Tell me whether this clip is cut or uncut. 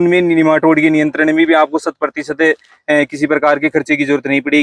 uncut